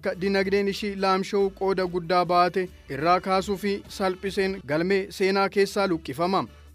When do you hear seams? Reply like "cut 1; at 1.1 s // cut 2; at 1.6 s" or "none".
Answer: none